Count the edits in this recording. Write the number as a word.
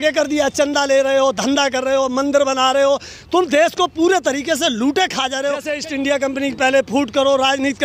one